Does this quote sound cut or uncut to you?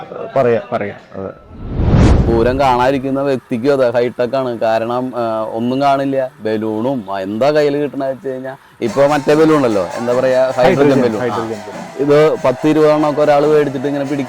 cut